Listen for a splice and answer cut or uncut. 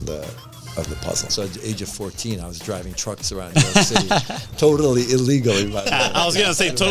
cut